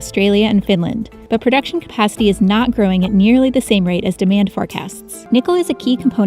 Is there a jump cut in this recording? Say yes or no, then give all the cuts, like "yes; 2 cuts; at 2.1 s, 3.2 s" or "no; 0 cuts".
yes; 2 cuts; at 1.1 s, 5.1 s